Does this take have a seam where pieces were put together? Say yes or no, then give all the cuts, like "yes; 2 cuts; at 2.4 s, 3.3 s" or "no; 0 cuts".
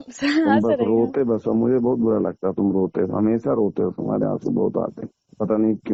no; 0 cuts